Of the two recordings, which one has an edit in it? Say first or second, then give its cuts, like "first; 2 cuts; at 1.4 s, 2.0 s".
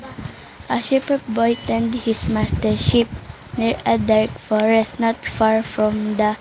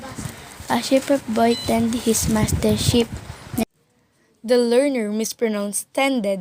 first; 1 cut; at 3.7 s